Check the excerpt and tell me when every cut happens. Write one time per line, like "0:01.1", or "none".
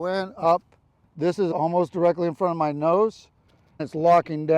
0:01.0
0:03.7